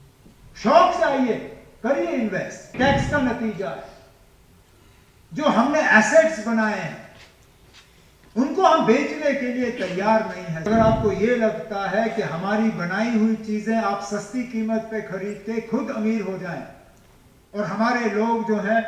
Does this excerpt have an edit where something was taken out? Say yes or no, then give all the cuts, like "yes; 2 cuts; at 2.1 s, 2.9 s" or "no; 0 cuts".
yes; 2 cuts; at 2.7 s, 10.7 s